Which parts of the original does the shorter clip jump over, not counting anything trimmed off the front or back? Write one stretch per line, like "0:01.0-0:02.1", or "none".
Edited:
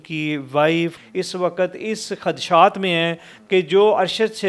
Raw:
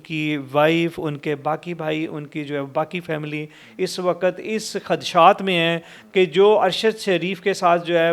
0:01.0-0:03.6